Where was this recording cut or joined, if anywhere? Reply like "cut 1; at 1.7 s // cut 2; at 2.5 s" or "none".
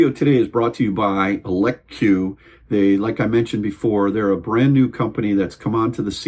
none